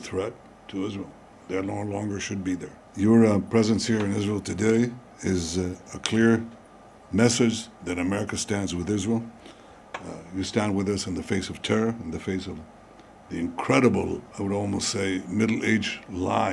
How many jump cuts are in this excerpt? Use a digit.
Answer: 3